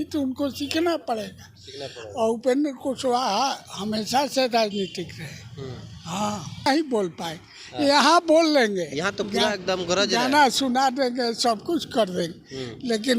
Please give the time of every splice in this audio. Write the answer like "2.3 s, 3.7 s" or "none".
6.7 s